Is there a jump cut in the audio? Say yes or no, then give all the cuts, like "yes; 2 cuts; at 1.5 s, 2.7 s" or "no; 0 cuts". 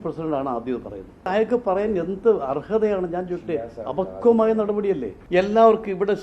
yes; 2 cuts; at 1.3 s, 5.1 s